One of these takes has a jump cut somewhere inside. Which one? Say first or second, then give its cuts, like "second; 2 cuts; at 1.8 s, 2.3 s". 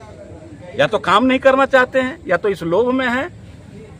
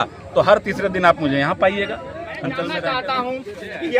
second; 1 cut; at 2.7 s